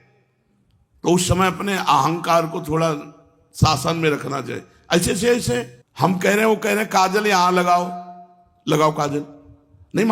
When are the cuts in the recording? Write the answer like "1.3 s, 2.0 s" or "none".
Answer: 5.8 s